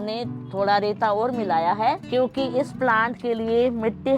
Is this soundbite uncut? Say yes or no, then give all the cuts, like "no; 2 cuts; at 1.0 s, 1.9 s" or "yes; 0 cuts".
no; 1 cut; at 2.0 s